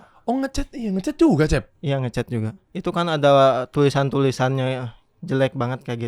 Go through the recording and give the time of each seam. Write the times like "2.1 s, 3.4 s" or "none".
1.7 s, 2.6 s